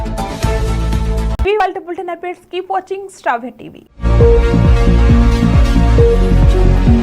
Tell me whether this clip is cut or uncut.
uncut